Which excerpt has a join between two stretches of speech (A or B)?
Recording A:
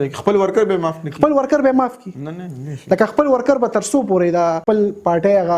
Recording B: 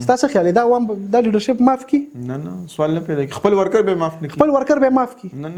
A